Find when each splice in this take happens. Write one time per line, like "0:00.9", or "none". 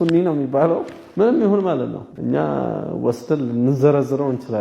0:01.0
0:02.1